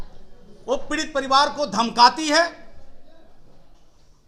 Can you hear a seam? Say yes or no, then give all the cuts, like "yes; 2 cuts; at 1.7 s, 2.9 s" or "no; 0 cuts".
no; 0 cuts